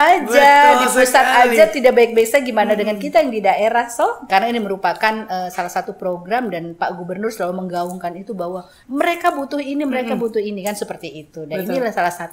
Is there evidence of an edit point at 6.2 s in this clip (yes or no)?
no